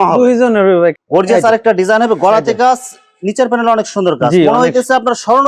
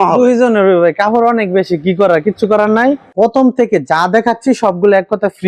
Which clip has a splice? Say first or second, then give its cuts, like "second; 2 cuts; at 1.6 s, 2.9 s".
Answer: first; 1 cut; at 1.0 s